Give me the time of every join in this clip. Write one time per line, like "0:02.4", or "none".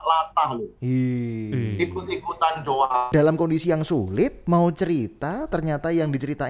0:03.1